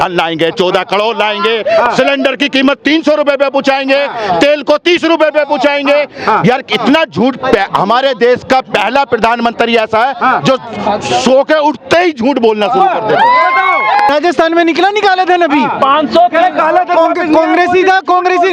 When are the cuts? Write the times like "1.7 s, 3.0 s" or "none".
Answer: 14.1 s